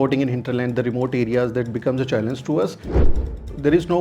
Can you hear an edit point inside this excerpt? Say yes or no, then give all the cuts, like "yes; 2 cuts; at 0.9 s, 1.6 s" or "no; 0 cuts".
yes; 1 cut; at 3.1 s